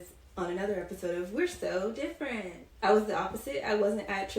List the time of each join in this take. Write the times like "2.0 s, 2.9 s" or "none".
2.6 s